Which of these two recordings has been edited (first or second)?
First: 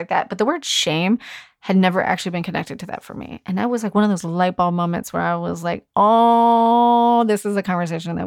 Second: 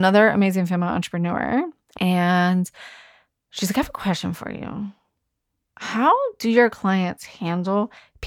second